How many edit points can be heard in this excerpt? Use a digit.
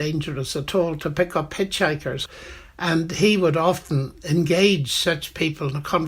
1